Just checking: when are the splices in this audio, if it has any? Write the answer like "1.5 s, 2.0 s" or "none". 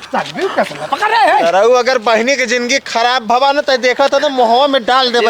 none